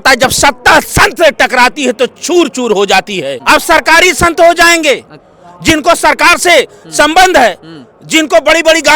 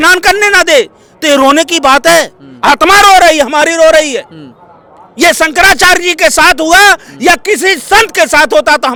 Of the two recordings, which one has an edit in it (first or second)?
first